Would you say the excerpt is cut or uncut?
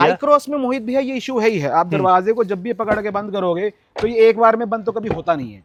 uncut